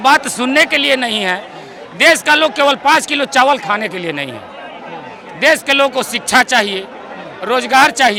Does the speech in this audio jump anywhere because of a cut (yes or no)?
no